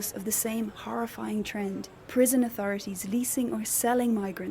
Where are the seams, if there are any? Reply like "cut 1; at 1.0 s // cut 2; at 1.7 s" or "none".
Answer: cut 1; at 1.9 s